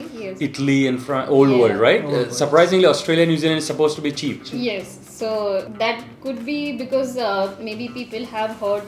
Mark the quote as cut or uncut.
cut